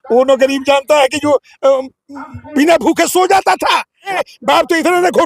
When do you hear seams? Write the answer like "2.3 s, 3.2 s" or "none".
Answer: 4.1 s